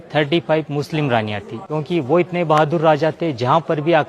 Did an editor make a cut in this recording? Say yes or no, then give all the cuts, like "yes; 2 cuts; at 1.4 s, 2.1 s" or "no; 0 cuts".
yes; 1 cut; at 1.5 s